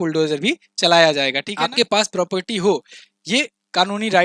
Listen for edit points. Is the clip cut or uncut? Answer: cut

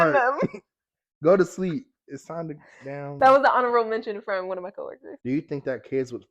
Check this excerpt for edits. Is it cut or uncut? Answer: cut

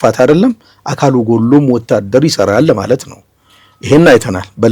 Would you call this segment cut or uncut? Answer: uncut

